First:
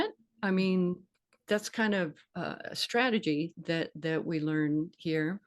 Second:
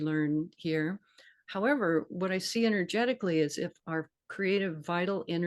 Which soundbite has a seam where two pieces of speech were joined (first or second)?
first